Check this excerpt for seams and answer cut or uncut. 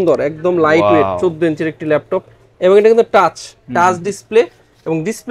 uncut